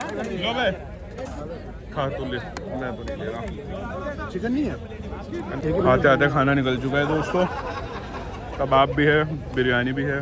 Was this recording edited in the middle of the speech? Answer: no; 0 cuts

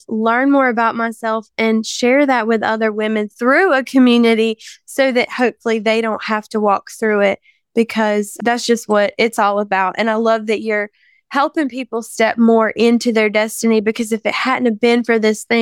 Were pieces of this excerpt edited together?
no; 0 cuts

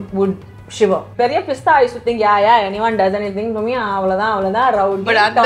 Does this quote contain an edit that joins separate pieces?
yes; 1 cut; at 1.1 s

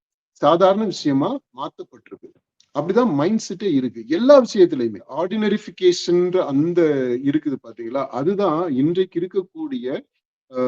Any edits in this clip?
yes; 1 cut; at 5.3 s

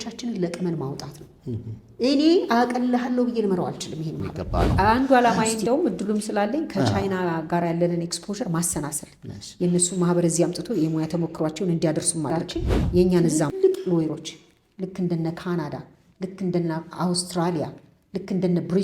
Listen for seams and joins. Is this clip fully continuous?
no; 2 cuts; at 4.3 s, 13.4 s

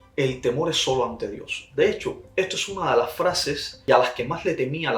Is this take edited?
yes; 1 cut; at 3.8 s

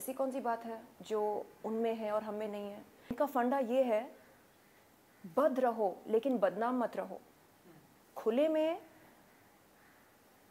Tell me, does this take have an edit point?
yes; 2 cuts; at 0.9 s, 3.1 s

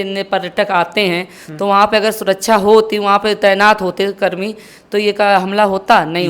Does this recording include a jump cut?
no; 0 cuts

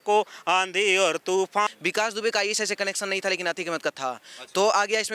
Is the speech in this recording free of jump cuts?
no; 1 cut; at 1.7 s

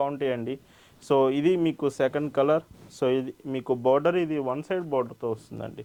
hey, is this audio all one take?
yes; 0 cuts

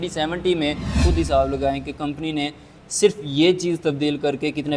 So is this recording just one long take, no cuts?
no; 1 cut; at 1.0 s

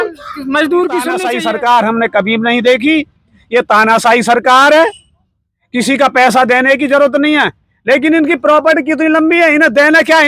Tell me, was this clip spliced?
yes; 1 cut; at 1.3 s

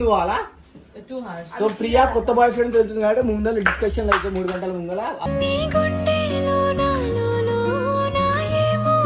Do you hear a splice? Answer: no; 0 cuts

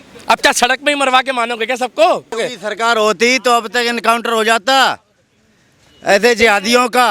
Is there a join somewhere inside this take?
yes; 1 cut; at 2.3 s

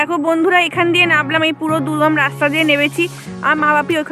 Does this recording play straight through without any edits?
yes; 0 cuts

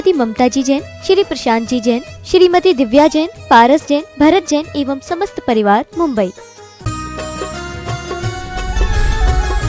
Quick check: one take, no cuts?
no; 1 cut; at 6.7 s

